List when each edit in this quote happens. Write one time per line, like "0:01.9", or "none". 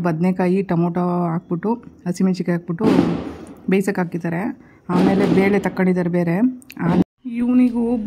0:07.0